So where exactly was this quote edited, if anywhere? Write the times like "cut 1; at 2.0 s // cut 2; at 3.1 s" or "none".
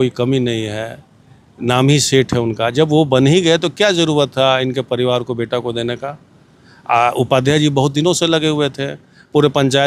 none